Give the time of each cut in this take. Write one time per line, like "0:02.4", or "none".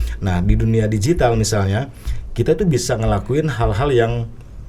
none